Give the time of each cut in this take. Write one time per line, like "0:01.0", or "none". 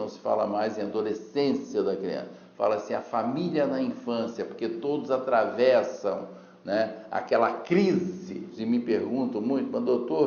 0:08.5